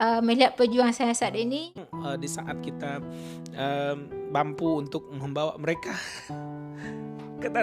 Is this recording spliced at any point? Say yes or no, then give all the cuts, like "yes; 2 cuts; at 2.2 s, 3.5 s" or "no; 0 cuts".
yes; 1 cut; at 1.7 s